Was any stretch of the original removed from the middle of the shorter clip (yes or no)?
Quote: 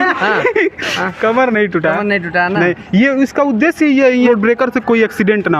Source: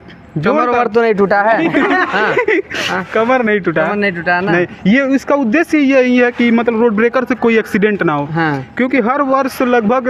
yes